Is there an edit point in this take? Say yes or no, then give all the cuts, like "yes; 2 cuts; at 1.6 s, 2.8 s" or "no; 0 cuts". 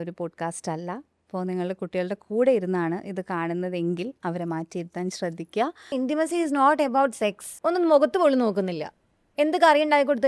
yes; 2 cuts; at 5.9 s, 7.5 s